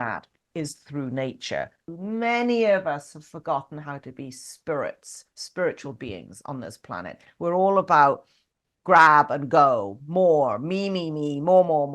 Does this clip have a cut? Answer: yes; 1 cut; at 1.8 s

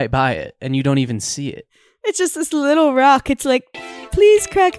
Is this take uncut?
no; 1 cut; at 2.0 s

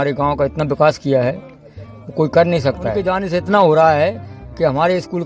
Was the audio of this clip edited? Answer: yes; 1 cut; at 2.9 s

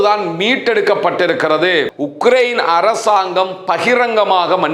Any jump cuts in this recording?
yes; 1 cut; at 1.9 s

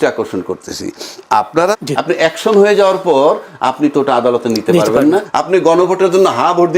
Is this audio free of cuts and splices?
no; 2 cuts; at 1.7 s, 5.3 s

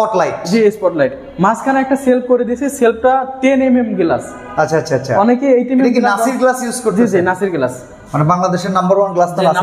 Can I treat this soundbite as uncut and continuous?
yes; 0 cuts

